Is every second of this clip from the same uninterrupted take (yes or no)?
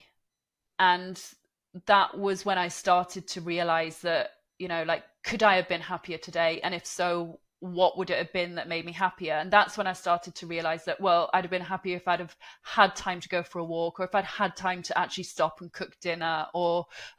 yes